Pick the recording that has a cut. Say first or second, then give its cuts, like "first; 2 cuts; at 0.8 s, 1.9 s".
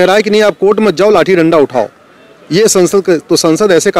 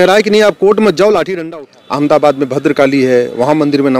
second; 1 cut; at 1.3 s